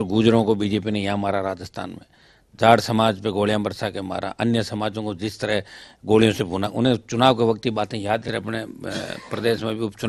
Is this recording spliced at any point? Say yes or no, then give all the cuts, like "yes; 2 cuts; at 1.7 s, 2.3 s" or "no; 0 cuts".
yes; 1 cut; at 8.3 s